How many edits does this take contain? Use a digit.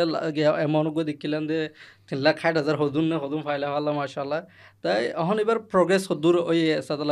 1